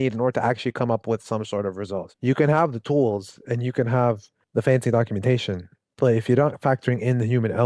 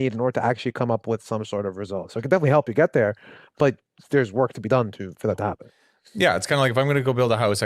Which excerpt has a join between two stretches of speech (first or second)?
first